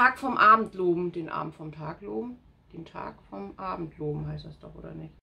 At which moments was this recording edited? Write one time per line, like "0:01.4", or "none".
none